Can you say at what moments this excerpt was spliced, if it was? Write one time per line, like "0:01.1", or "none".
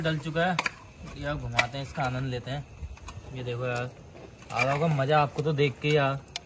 none